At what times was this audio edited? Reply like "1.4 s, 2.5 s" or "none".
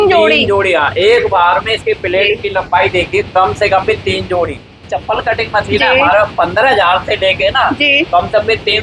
4.9 s